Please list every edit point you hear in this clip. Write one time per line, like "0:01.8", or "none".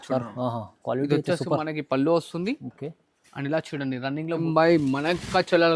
0:04.4

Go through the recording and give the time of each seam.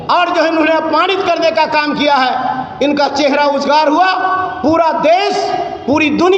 none

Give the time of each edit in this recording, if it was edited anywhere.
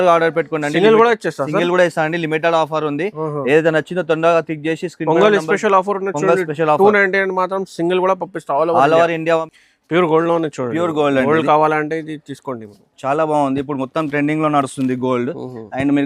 0:09.5

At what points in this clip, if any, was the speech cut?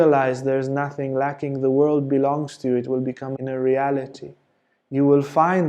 0:03.4

